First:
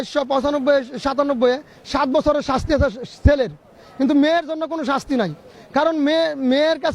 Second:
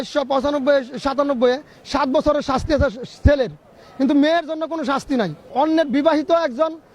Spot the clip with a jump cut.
second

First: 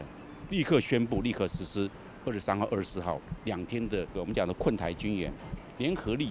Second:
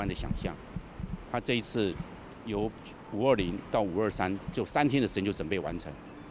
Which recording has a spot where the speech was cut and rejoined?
first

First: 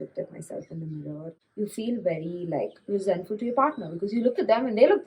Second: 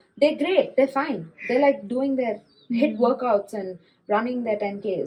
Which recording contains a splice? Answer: first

